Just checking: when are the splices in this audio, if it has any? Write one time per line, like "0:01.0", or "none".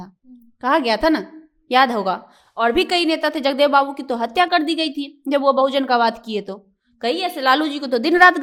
none